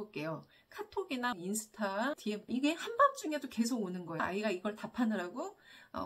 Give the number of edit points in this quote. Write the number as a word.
two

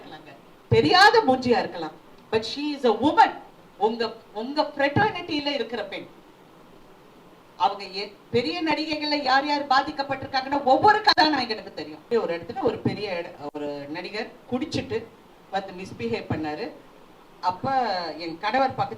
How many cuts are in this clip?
one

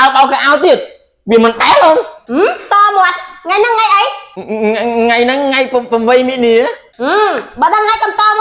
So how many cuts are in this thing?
zero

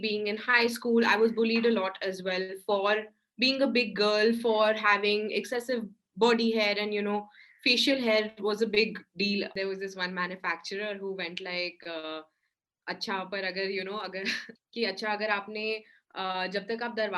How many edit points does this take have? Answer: two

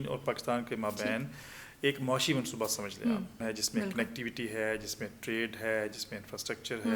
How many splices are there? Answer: one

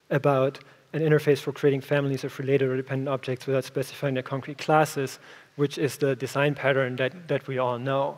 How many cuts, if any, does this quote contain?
one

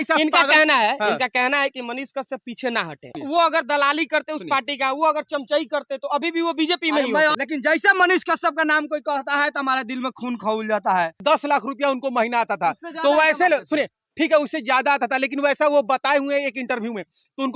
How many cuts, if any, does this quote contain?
three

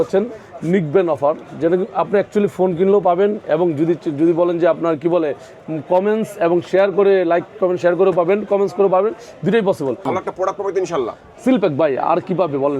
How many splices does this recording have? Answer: one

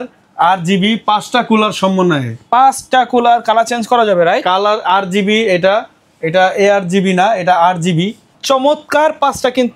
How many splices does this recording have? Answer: zero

